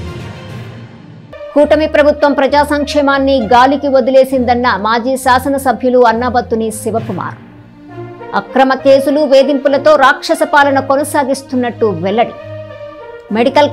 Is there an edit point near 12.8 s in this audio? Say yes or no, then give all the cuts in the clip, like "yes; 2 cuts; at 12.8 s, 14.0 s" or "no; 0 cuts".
no; 1 cut; at 1.5 s